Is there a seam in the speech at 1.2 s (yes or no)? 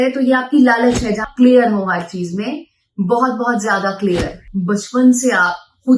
yes